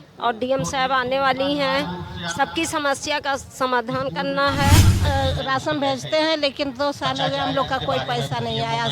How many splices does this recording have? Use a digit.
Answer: 1